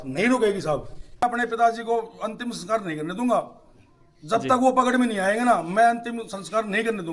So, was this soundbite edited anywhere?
yes; 1 cut; at 1.4 s

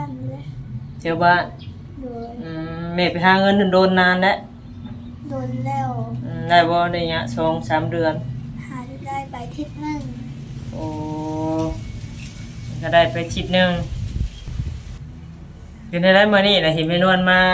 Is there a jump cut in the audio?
yes; 1 cut; at 14.8 s

